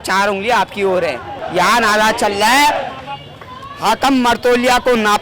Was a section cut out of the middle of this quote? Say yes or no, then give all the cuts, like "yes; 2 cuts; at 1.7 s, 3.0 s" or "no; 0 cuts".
yes; 1 cut; at 1.4 s